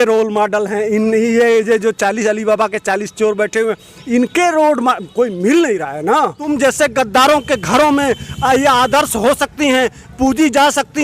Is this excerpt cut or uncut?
cut